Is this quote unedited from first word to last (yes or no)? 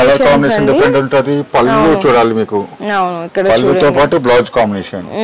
yes